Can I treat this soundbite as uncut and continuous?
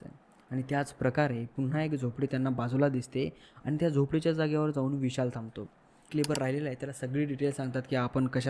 no; 1 cut; at 6.1 s

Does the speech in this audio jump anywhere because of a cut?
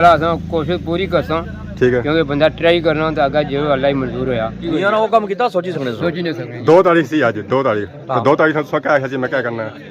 yes; 1 cut; at 4.7 s

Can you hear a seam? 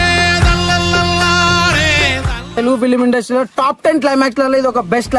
yes; 1 cut; at 2.5 s

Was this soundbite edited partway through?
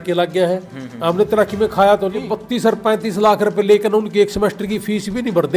yes; 1 cut; at 2.3 s

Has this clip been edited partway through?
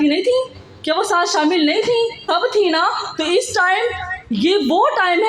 yes; 1 cut; at 2.2 s

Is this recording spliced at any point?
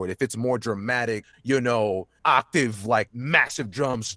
yes; 3 cuts; at 1.3 s, 2.1 s, 3.2 s

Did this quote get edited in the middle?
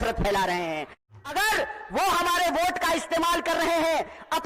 yes; 1 cut; at 1.1 s

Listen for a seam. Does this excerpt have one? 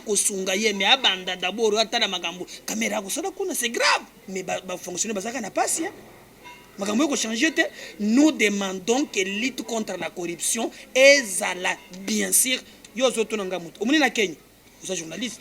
yes; 1 cut; at 4.2 s

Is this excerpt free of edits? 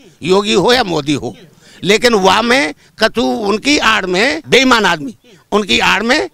no; 1 cut; at 4.4 s

